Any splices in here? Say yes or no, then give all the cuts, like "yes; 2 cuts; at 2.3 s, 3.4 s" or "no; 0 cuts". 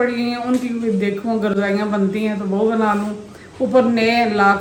no; 0 cuts